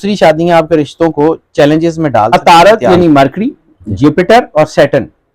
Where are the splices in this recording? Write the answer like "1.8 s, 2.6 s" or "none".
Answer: 2.4 s